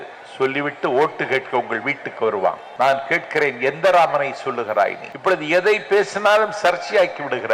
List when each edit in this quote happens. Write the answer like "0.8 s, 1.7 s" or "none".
2.7 s, 5.1 s

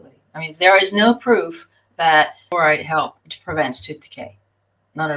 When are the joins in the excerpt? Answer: 2.5 s

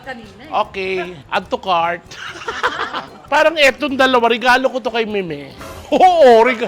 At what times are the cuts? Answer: 3.0 s

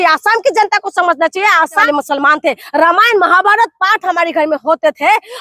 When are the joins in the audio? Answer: 1.8 s

